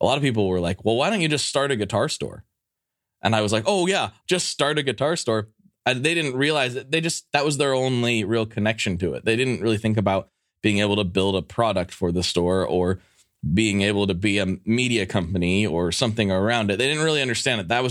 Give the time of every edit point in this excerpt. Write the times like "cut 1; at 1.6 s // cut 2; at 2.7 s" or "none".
cut 1; at 4.0 s